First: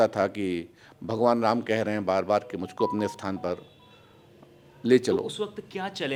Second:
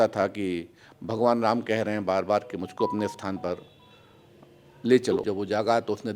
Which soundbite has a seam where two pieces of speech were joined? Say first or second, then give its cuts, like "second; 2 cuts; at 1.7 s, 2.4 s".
second; 1 cut; at 5.2 s